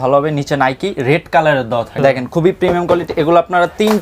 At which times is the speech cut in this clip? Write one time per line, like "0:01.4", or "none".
0:01.9